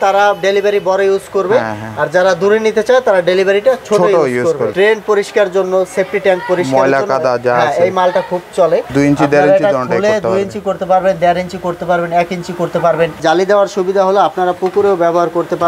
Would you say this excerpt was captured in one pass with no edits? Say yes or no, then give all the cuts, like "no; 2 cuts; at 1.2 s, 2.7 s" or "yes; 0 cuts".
no; 3 cuts; at 4.7 s, 8.9 s, 13.2 s